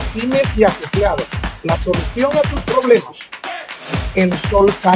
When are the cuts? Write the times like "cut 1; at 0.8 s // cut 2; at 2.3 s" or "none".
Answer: none